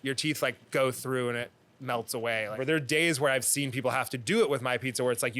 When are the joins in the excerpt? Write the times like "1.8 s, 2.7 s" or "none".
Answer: 2.6 s